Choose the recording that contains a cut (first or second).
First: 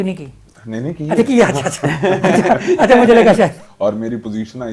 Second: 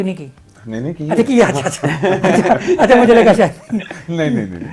first